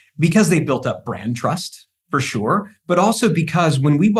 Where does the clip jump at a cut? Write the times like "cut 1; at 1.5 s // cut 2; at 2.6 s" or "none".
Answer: none